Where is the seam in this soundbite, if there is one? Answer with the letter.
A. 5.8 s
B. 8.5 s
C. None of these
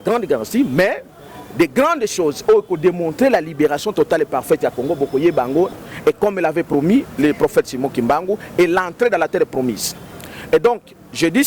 A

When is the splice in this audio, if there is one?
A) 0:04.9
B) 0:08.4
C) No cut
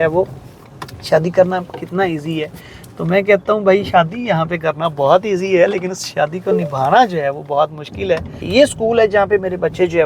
B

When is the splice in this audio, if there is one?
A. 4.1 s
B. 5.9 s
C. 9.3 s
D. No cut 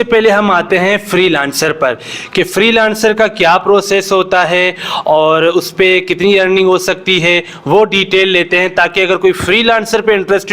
D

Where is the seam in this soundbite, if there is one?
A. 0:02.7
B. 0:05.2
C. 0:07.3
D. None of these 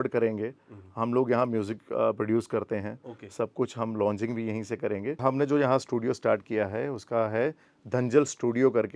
B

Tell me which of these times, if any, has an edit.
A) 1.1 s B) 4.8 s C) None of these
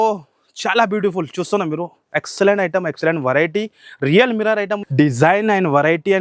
B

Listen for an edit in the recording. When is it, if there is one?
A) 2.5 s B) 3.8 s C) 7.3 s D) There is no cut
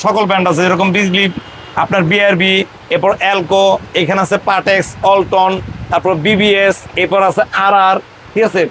D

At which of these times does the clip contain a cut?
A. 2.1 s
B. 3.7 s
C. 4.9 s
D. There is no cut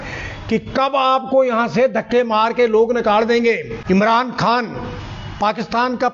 B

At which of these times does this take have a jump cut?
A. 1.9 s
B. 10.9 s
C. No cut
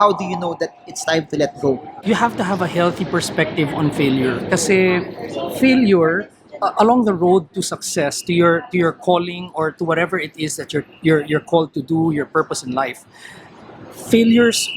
A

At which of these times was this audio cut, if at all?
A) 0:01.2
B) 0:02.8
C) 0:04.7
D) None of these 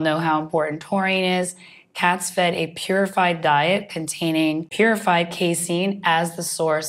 C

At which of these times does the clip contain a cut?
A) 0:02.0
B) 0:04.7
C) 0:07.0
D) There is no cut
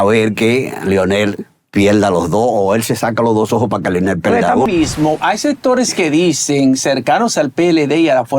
B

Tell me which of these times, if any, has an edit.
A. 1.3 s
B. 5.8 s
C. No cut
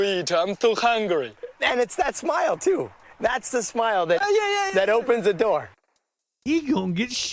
B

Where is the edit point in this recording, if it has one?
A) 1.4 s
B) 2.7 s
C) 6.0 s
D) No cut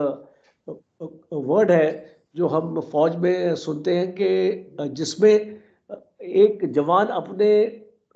D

